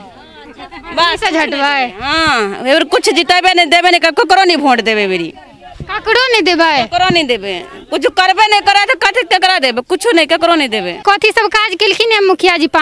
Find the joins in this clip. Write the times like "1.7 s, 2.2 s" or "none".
11.0 s